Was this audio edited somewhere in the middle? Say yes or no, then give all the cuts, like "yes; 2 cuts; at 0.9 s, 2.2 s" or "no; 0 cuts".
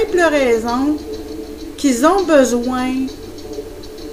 yes; 1 cut; at 2.5 s